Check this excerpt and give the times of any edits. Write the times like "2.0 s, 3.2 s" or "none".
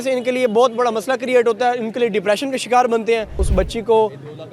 3.4 s